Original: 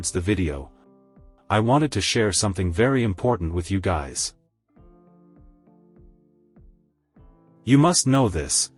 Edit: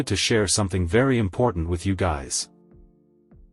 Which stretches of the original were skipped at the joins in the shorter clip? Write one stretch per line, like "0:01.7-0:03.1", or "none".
0:04.2-0:05.6